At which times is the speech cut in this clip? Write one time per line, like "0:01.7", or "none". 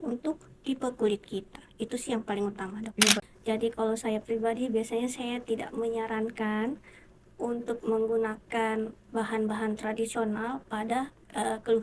0:03.2